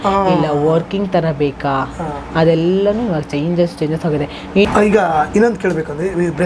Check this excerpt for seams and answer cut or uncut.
cut